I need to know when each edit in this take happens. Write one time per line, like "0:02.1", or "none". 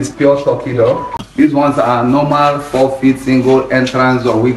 0:01.2